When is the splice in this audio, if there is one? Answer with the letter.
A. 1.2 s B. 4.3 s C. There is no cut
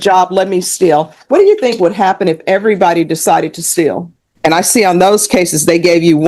B